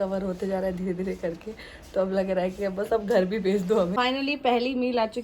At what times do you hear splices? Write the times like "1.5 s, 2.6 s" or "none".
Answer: 3.9 s